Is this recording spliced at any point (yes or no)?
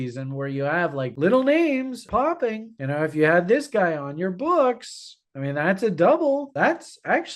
yes